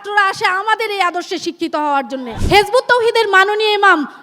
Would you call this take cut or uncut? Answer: cut